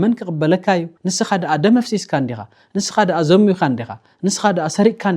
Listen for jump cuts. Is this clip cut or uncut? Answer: cut